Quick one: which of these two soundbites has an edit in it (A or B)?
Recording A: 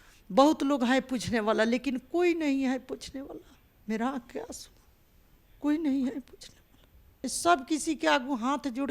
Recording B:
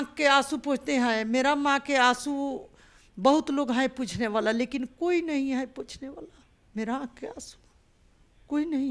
A